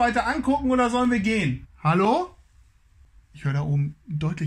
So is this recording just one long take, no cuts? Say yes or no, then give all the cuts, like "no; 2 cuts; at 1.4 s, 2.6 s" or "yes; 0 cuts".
no; 1 cut; at 1.7 s